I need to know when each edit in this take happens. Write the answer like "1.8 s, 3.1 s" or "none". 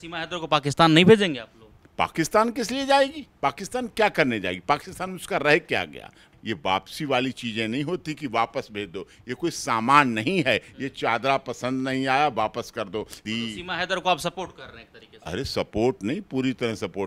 6.3 s, 13.2 s